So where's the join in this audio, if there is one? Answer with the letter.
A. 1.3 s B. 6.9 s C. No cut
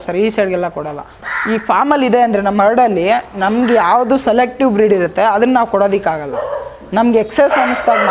A